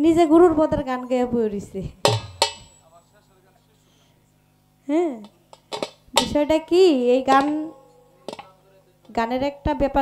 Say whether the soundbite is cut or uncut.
uncut